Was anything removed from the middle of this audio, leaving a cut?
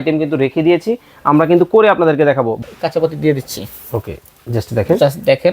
yes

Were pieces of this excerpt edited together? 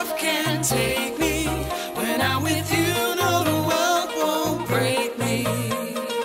no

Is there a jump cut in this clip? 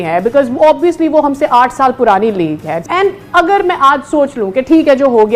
yes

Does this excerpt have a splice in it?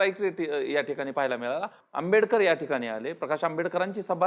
yes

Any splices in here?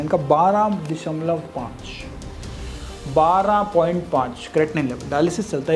no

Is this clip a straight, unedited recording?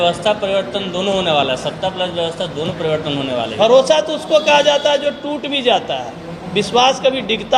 no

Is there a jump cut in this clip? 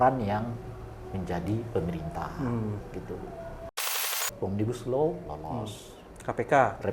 yes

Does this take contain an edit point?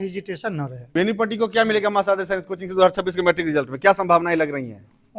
yes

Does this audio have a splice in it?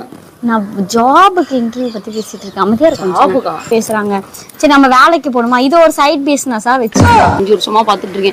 yes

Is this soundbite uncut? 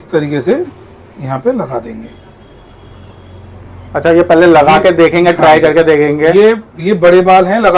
yes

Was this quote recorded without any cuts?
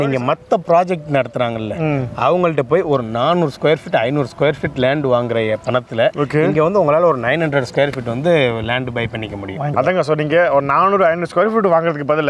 no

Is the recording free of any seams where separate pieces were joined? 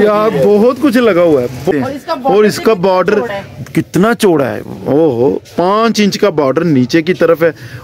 no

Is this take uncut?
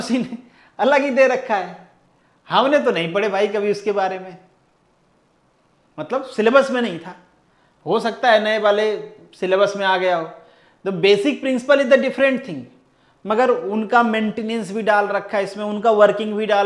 yes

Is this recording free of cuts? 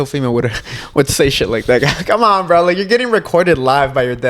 yes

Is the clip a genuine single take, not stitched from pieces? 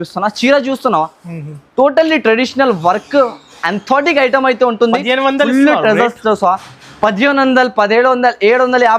yes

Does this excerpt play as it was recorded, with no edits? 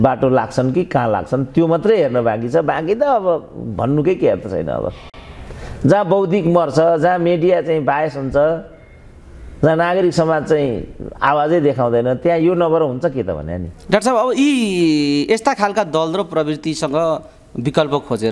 yes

